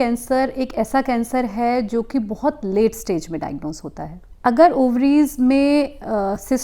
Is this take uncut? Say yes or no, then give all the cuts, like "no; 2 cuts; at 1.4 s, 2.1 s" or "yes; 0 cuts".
yes; 0 cuts